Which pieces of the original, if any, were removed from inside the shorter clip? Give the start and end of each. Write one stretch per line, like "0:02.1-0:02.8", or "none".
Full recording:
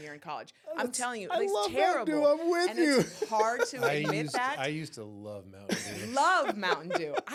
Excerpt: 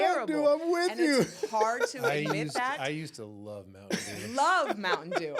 none